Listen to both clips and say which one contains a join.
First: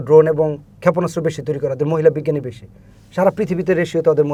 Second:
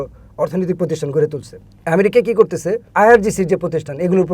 second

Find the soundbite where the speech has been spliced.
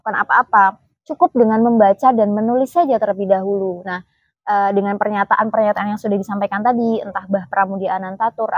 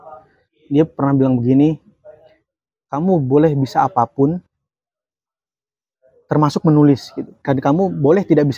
second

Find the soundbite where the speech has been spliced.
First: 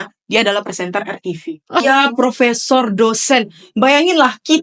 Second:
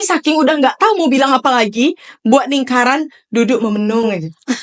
first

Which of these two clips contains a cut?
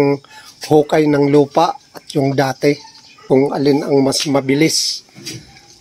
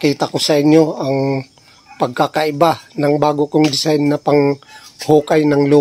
first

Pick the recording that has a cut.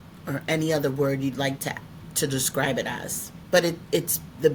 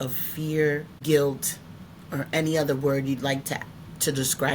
second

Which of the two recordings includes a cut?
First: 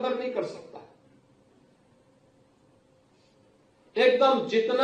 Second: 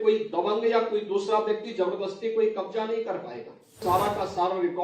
second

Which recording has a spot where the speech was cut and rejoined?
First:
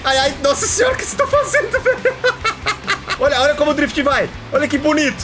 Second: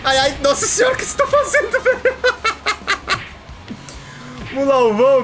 first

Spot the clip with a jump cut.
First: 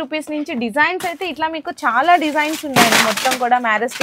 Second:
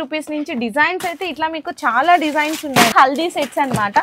second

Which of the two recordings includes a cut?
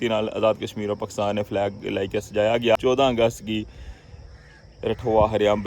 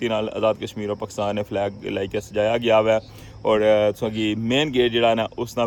first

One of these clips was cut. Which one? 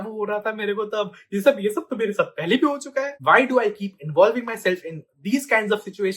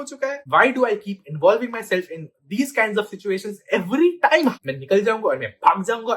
second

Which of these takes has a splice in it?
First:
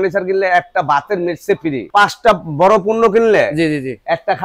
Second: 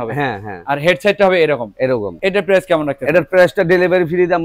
first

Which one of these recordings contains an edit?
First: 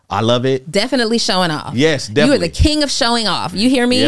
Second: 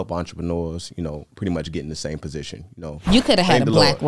second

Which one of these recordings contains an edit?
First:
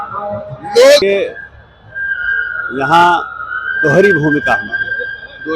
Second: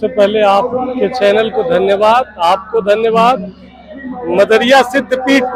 first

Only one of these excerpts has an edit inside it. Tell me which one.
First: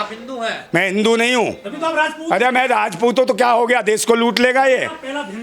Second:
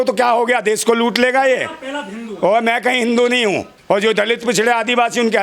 second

